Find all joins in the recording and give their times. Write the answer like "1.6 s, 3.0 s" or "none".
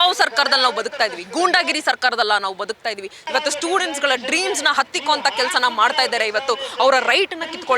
3.2 s